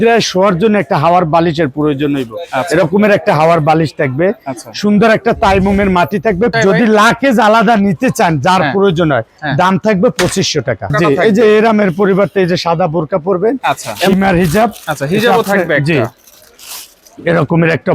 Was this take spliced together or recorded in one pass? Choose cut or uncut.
cut